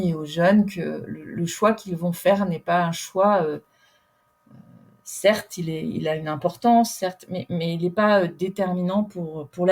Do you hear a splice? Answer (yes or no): no